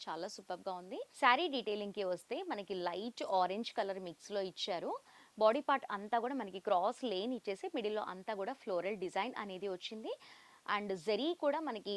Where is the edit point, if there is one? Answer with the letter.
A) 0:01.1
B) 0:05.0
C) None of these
A